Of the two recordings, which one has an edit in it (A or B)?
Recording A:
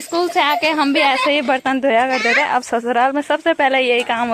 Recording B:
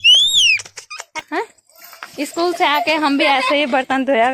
B